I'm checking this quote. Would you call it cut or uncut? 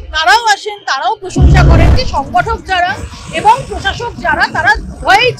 cut